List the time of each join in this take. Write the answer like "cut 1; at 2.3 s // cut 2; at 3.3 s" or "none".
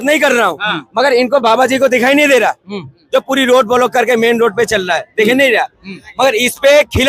none